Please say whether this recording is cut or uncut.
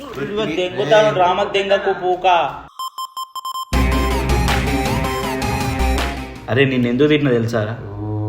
uncut